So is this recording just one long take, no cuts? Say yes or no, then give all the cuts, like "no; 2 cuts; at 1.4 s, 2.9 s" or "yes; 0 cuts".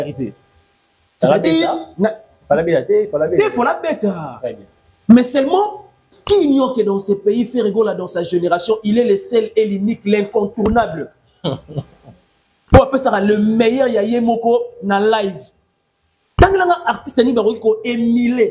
no; 1 cut; at 6.1 s